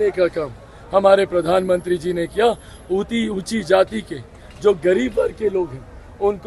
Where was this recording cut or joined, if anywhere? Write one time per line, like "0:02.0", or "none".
none